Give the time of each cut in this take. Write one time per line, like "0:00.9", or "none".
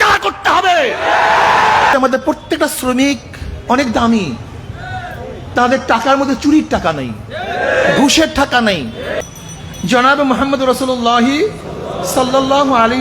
0:01.9
0:09.2